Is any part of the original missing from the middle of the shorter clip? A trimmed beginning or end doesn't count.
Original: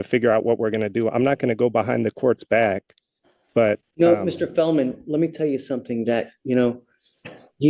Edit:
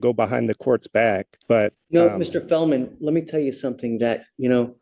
yes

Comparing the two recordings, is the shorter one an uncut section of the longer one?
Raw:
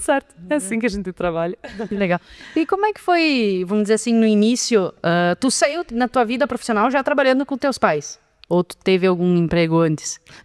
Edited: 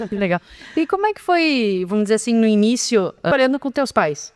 no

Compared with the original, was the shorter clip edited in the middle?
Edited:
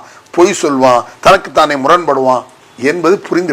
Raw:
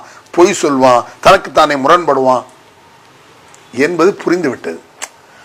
yes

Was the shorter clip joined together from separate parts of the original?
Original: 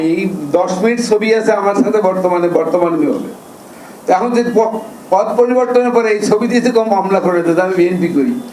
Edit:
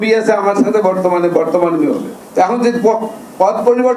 yes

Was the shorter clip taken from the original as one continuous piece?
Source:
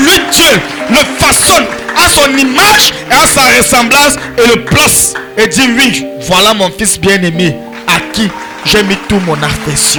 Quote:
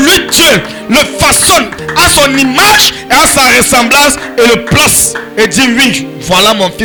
yes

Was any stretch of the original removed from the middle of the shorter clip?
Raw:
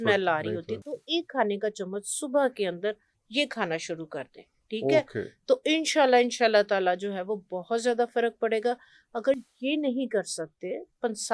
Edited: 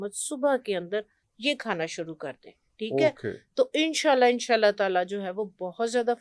no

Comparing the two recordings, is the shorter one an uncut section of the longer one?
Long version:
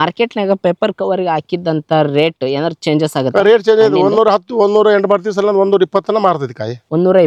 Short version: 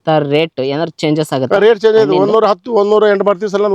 yes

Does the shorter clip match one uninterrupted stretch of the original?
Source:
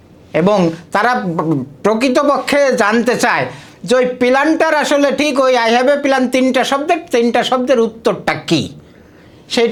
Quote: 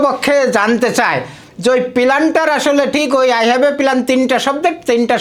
yes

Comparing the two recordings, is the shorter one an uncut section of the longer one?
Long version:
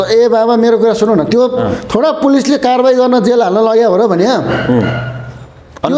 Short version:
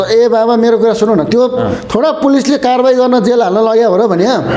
yes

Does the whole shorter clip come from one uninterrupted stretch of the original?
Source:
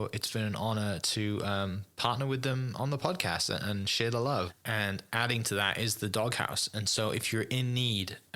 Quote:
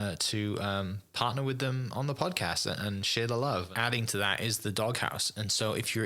no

